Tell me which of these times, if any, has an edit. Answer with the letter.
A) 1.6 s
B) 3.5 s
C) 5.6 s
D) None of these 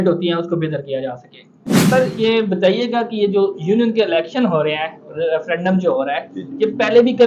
A